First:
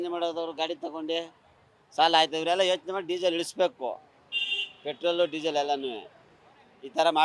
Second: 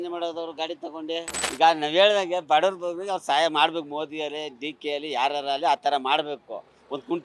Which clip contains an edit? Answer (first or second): second